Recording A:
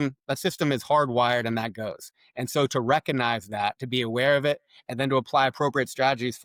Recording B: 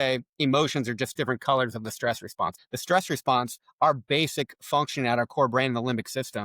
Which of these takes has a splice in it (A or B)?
B